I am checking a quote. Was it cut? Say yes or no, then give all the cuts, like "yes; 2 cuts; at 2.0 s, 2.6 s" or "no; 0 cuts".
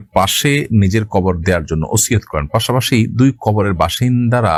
no; 0 cuts